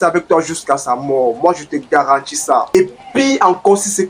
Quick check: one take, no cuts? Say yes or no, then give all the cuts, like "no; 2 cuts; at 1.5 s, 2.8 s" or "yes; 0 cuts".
no; 1 cut; at 2.7 s